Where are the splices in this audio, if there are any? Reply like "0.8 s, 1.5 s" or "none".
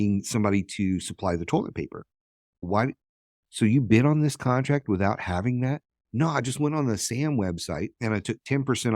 7.9 s